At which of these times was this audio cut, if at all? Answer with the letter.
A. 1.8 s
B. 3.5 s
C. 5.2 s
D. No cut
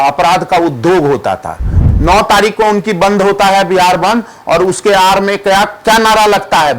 A